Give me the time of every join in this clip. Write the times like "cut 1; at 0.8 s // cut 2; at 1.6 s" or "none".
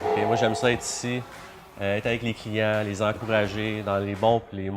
none